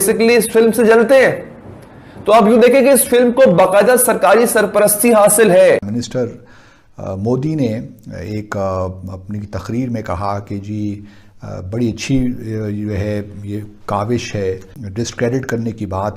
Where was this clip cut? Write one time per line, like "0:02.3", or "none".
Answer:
0:06.0
0:14.8